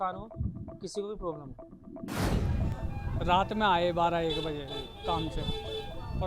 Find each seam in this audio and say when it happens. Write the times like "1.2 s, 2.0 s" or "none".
2.3 s